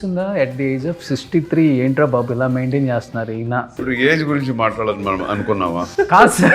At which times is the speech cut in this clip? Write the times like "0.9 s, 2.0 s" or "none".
3.8 s